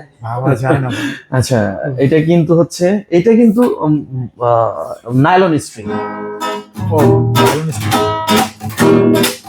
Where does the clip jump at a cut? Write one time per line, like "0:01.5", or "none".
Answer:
none